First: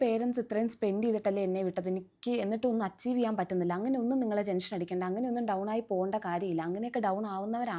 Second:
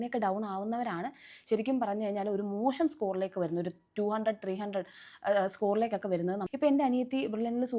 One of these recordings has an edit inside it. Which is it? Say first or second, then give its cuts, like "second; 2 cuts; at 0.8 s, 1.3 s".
second; 1 cut; at 6.4 s